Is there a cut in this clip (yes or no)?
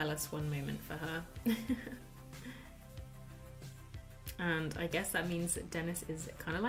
no